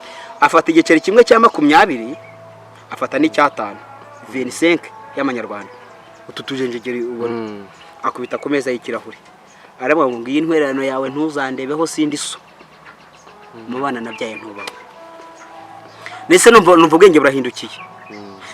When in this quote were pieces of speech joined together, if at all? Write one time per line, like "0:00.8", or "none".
none